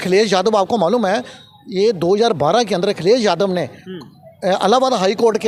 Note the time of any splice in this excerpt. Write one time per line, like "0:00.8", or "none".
none